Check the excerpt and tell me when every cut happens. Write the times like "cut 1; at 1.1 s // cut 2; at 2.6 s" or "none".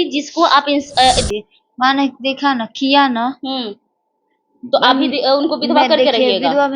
cut 1; at 1.3 s